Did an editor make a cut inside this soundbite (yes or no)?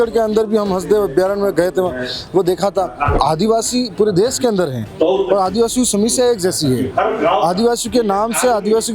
yes